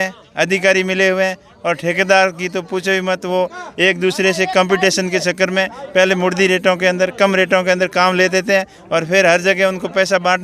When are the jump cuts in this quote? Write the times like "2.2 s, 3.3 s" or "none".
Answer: none